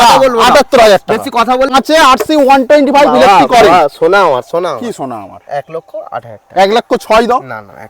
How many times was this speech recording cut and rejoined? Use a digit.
1